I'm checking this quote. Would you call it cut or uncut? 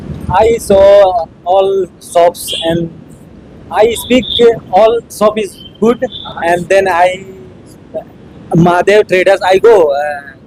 uncut